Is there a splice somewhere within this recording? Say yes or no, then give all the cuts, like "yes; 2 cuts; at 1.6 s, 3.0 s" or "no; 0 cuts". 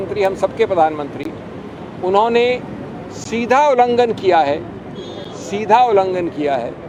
no; 0 cuts